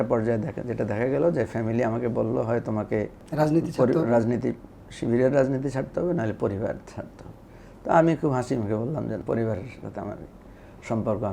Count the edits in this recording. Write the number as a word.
two